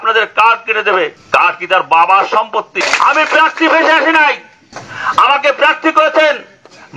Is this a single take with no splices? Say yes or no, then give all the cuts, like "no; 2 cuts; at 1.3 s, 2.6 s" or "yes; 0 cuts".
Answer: no; 2 cuts; at 1.2 s, 2.8 s